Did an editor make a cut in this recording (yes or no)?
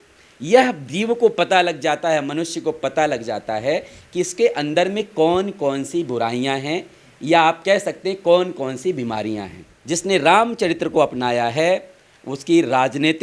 yes